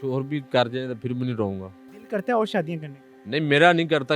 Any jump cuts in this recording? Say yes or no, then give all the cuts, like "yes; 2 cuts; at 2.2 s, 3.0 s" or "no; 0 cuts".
yes; 1 cut; at 1.9 s